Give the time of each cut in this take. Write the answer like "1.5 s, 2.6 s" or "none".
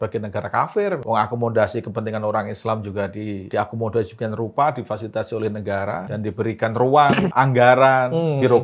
1.0 s, 3.5 s, 6.0 s, 7.3 s